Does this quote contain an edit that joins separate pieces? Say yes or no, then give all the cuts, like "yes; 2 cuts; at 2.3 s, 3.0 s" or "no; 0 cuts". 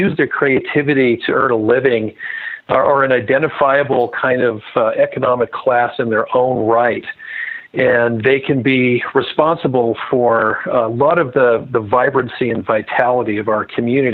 no; 0 cuts